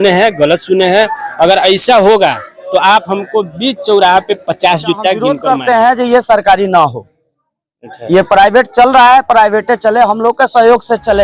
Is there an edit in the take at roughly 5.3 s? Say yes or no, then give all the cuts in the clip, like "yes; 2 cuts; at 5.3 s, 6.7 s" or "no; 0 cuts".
yes; 1 cut; at 5.3 s